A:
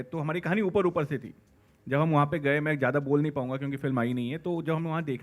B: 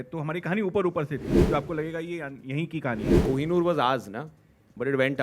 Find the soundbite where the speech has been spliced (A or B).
B